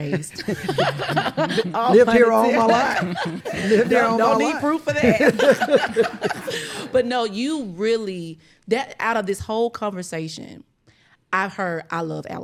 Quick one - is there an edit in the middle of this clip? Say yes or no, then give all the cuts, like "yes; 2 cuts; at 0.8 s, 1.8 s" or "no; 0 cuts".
no; 0 cuts